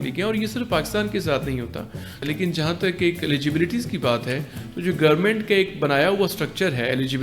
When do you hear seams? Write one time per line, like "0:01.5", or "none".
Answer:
0:02.2